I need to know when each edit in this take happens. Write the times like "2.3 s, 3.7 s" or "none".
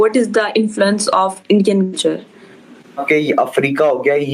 3.0 s